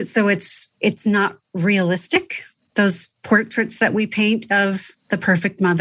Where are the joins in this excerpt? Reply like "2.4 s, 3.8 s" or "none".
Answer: none